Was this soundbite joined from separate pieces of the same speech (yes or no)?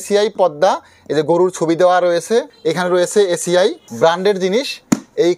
yes